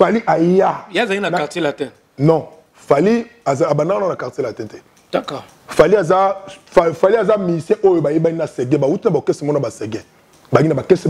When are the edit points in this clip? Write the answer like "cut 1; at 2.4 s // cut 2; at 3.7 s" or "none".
none